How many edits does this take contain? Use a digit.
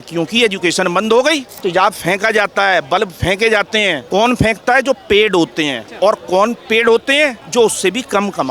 4